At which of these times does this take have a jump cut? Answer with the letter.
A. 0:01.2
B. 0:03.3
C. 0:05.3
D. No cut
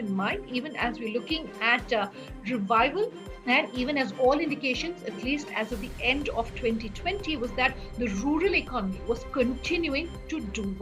B